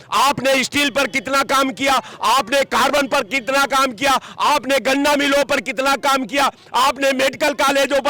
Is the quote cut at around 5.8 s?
no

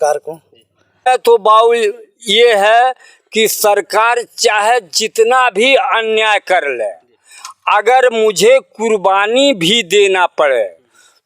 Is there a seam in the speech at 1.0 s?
yes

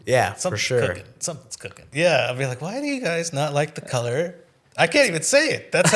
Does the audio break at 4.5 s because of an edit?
no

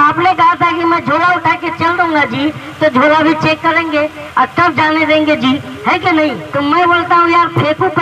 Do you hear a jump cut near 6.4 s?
yes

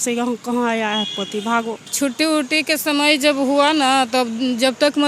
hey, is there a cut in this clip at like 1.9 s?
yes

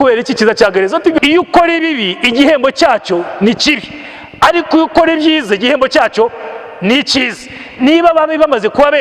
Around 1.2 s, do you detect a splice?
yes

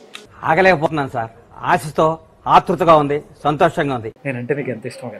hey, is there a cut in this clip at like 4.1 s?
yes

